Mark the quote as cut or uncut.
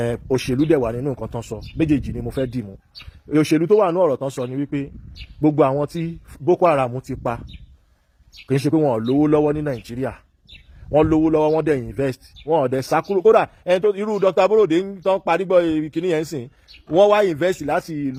uncut